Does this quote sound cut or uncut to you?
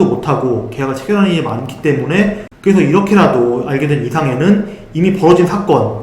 cut